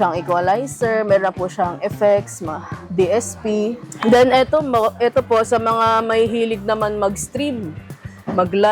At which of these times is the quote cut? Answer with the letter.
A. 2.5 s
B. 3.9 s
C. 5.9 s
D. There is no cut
B